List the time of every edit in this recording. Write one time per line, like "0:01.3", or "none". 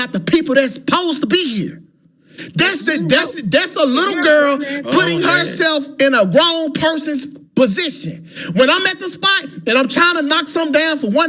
none